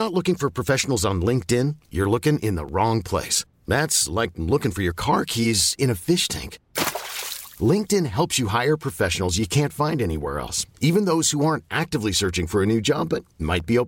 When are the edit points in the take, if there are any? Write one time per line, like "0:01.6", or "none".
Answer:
none